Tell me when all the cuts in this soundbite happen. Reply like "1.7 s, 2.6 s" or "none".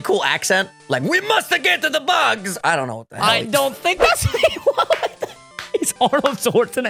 none